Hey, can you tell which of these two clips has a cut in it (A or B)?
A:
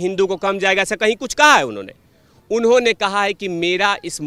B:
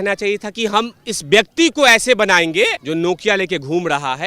B